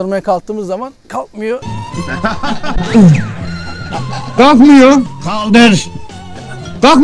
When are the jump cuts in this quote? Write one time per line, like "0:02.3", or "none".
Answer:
none